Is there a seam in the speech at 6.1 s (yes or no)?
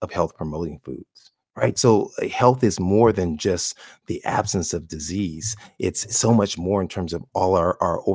no